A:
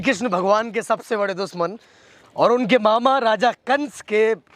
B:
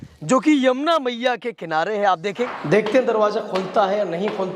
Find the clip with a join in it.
B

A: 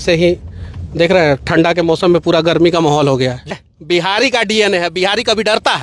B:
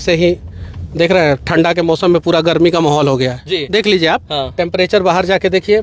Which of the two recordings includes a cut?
A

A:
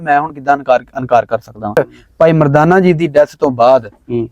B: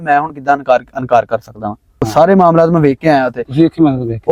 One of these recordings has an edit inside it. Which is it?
A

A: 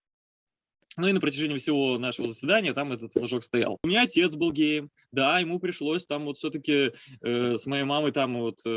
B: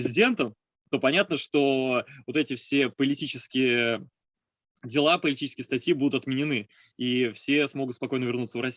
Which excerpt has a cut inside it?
A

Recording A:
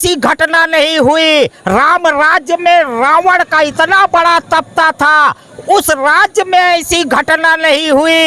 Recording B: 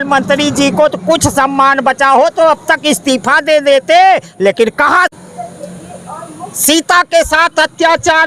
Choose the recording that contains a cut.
B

